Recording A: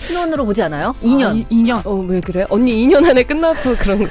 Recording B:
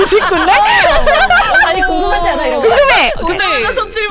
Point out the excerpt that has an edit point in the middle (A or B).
A